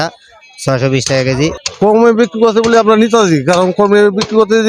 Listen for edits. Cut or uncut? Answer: cut